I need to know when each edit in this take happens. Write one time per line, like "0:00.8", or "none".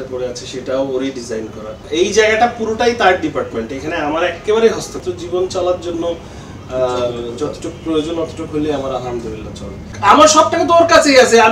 0:01.9
0:04.9
0:09.8